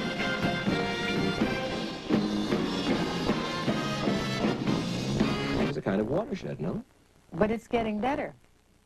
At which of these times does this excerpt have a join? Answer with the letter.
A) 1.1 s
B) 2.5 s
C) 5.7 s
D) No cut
D